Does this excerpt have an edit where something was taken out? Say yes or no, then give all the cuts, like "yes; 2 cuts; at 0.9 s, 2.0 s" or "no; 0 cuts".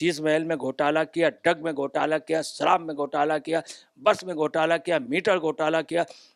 no; 0 cuts